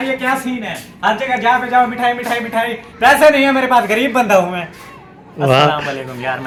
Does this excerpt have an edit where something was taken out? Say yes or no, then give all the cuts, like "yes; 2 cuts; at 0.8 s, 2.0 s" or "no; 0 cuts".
no; 0 cuts